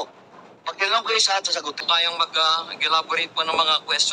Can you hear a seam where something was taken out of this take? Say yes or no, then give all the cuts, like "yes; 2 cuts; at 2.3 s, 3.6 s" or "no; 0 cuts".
yes; 1 cut; at 1.8 s